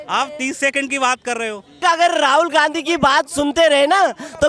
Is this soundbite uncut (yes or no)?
no